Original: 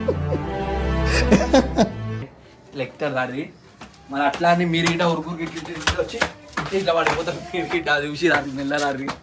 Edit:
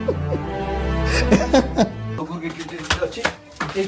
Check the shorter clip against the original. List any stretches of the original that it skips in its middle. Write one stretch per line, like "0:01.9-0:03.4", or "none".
0:02.2-0:05.2